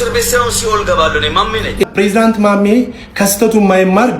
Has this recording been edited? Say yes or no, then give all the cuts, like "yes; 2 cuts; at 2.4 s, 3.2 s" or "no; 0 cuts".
yes; 1 cut; at 1.8 s